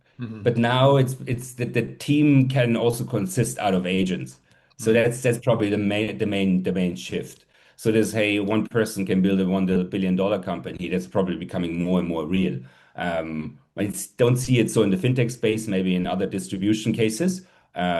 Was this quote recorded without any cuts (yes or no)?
yes